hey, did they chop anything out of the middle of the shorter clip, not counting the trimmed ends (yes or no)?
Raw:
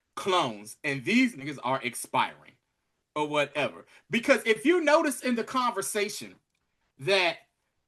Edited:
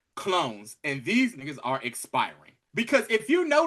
yes